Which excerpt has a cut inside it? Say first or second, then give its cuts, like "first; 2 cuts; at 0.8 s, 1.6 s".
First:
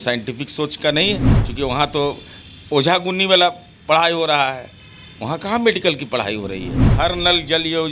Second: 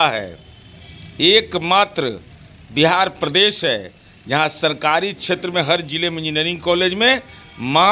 first; 2 cuts; at 1.4 s, 6.8 s